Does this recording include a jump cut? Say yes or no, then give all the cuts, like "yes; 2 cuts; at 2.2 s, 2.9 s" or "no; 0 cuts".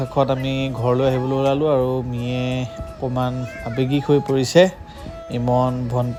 no; 0 cuts